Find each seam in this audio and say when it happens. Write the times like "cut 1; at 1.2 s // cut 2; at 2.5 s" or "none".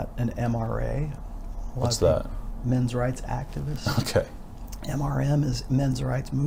none

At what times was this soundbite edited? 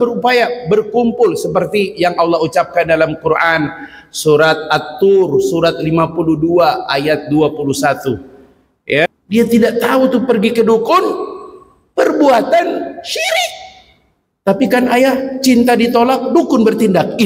cut 1; at 9.1 s

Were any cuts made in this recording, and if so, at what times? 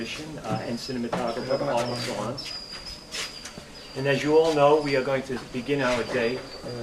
cut 1; at 1.5 s

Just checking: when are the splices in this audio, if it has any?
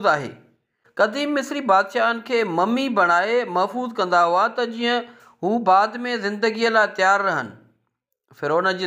cut 1; at 1.1 s

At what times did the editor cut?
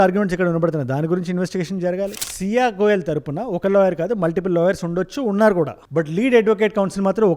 cut 1; at 2.2 s

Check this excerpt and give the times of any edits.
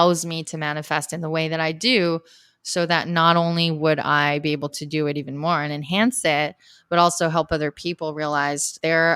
none

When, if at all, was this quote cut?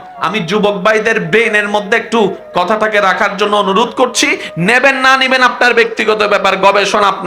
none

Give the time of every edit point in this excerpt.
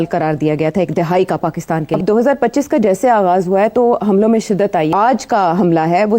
cut 1; at 2.0 s // cut 2; at 4.9 s

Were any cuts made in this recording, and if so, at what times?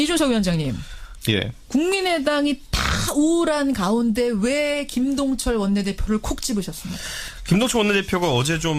cut 1; at 2.0 s

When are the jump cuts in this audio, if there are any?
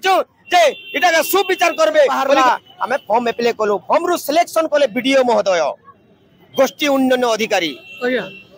cut 1; at 2.4 s

